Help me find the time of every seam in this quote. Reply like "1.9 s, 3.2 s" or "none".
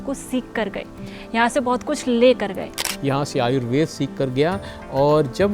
2.9 s